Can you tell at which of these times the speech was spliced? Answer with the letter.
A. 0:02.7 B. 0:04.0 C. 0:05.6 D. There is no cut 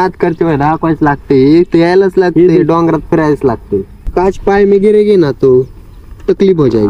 B